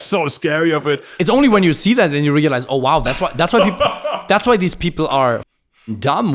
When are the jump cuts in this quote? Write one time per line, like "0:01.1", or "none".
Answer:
none

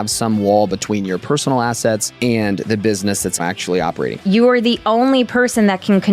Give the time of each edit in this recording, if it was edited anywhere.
0:02.1
0:03.8

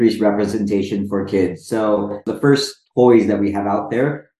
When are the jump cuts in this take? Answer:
0:02.2

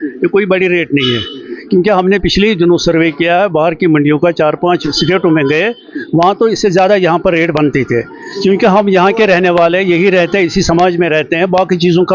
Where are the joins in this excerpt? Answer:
none

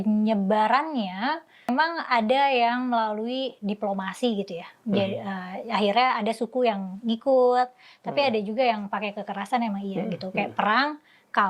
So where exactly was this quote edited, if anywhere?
0:01.7

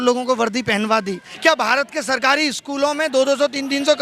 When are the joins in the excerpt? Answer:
0:01.2

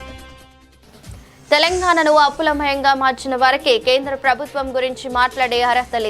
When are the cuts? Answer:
0:01.3

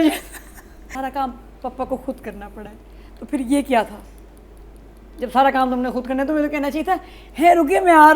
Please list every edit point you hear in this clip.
0:00.9

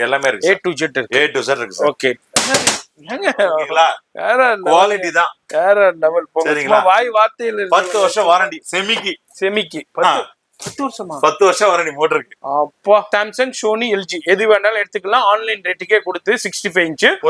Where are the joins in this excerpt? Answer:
0:02.2
0:13.1

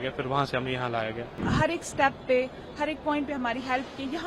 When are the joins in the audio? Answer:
0:01.4

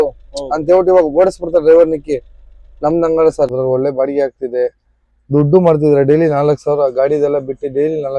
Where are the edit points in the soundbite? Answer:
0:03.5

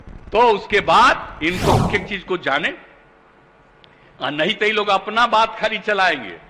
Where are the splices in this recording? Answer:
0:01.9

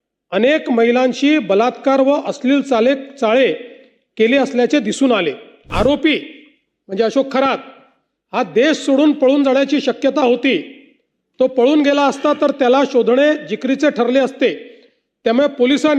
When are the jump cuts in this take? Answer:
0:05.7

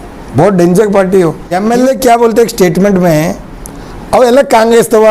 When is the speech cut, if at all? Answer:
0:01.5

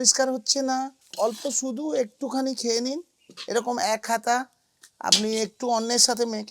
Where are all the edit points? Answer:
0:01.0

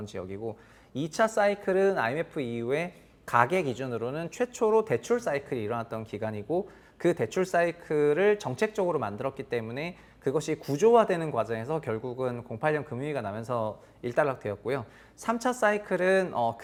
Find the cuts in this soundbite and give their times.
none

